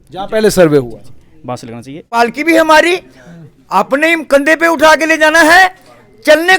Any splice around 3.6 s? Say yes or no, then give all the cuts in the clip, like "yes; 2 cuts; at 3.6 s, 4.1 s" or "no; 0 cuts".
no; 1 cut; at 2.1 s